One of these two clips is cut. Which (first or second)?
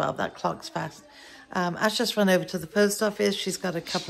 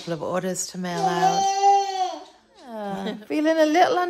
second